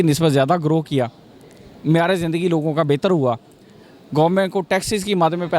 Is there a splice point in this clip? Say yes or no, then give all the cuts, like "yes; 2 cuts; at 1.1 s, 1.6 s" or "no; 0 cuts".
no; 0 cuts